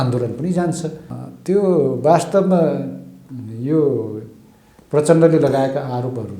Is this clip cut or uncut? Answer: cut